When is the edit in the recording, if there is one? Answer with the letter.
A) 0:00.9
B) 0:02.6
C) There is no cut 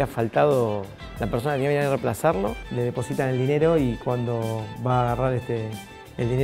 B